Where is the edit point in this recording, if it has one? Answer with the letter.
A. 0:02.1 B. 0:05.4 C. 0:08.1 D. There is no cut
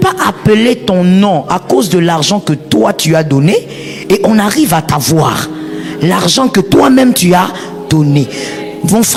D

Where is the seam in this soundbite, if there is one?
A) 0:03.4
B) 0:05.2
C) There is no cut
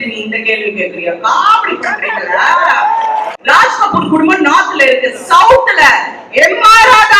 A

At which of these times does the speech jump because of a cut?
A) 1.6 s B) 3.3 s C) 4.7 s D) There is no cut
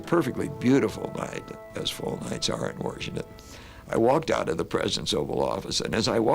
A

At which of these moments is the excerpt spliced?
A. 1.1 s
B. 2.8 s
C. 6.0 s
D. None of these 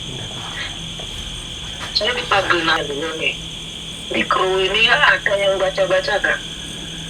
B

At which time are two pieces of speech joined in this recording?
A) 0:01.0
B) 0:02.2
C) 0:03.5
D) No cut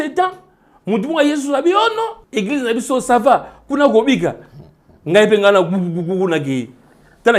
B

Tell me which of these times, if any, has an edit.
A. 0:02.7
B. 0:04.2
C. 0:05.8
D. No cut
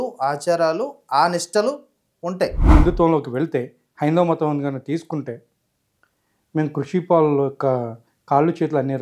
A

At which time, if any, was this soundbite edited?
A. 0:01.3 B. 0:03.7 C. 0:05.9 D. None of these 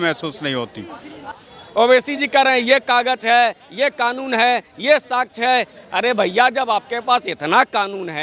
A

